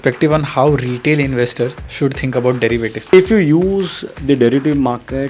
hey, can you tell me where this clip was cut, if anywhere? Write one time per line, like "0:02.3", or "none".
0:03.1